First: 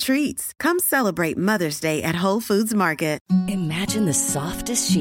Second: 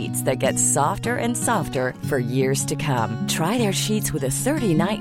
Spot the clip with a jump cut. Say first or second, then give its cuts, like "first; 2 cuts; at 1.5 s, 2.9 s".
first; 1 cut; at 3.2 s